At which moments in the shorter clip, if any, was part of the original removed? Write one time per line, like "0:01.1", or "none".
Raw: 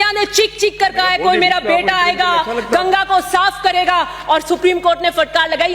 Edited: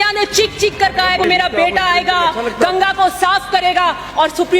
0:01.2